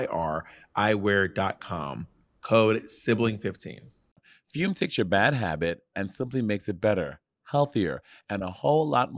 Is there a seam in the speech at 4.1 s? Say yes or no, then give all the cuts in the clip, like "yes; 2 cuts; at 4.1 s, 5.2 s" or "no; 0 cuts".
yes; 1 cut; at 4.1 s